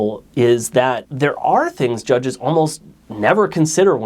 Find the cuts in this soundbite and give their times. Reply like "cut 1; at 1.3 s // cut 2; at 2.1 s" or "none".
cut 1; at 1.1 s